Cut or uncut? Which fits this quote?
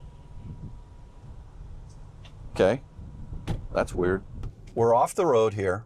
cut